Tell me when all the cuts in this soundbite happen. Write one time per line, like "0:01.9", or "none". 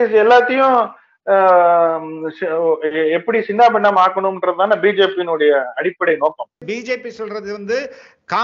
0:06.5